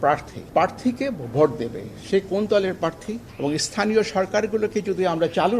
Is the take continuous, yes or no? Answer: no